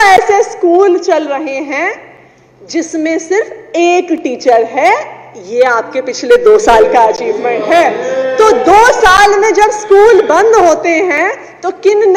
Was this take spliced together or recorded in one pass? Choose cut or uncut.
uncut